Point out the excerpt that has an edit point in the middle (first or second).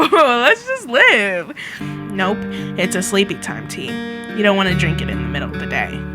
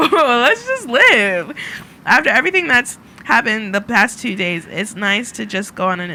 first